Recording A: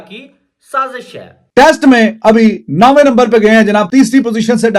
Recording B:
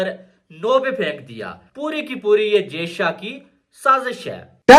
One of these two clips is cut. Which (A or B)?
A